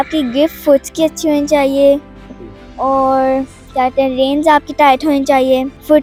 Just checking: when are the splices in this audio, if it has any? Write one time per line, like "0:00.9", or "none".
none

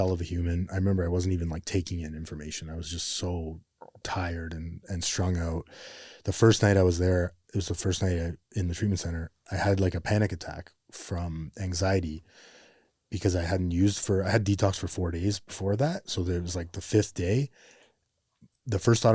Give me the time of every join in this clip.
none

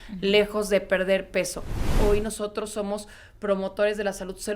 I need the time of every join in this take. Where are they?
0:01.9

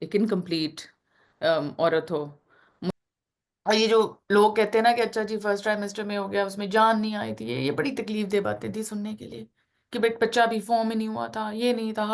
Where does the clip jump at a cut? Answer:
0:02.9

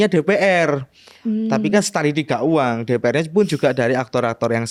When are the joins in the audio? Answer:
none

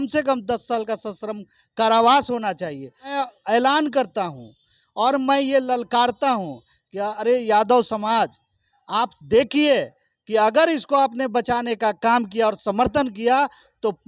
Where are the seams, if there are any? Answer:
0:03.0

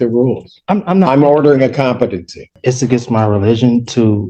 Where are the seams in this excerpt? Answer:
0:02.5

